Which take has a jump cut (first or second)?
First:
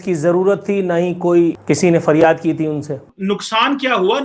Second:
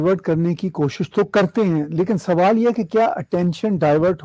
first